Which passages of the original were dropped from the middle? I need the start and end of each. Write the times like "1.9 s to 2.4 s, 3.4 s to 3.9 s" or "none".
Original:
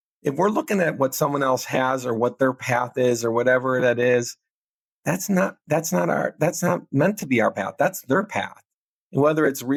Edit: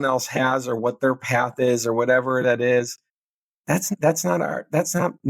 5.3 s to 5.6 s

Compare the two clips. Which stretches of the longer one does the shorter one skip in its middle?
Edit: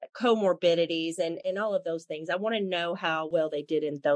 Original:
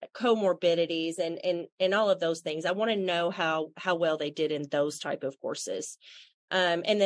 1.4 s to 1.7 s, 3.7 s to 4.0 s

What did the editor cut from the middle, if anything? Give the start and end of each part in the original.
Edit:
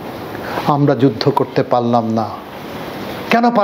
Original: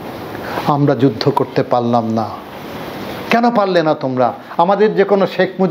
none

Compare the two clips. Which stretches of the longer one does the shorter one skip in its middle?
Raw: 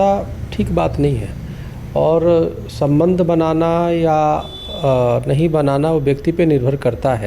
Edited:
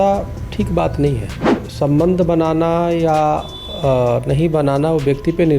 1.6 s to 2.6 s

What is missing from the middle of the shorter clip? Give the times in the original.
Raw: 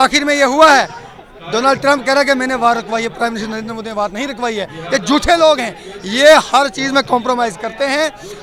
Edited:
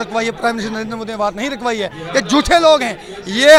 none

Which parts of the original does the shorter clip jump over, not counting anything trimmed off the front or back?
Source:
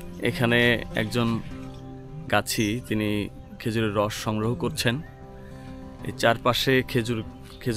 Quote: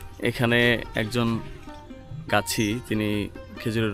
none

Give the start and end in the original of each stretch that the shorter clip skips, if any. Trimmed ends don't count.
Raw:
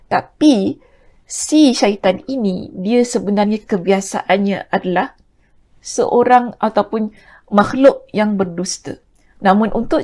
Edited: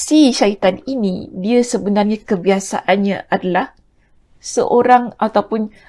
none

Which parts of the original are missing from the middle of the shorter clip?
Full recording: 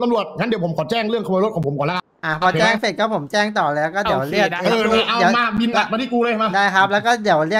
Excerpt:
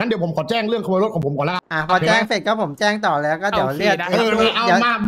2.1 s to 2.2 s

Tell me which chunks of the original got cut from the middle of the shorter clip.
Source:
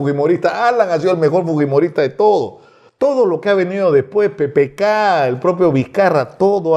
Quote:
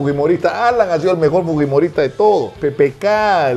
2.6 s to 4.3 s

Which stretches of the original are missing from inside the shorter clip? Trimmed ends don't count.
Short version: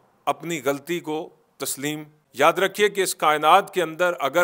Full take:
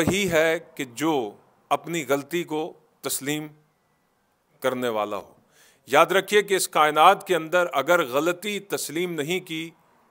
3.6 s to 5.7 s

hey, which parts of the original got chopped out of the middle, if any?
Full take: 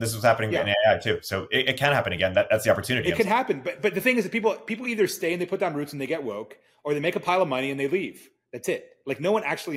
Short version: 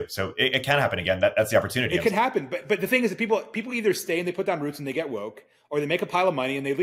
none

